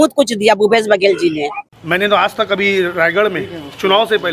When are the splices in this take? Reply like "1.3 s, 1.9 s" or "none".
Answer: 1.7 s